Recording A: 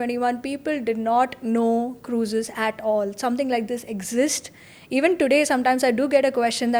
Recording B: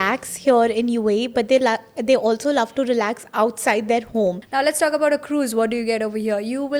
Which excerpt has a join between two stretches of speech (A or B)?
B